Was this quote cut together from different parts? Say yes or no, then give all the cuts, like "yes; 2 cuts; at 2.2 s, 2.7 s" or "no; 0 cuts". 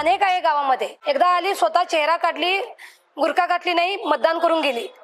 yes; 1 cut; at 1.0 s